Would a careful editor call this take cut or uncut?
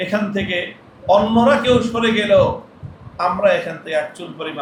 uncut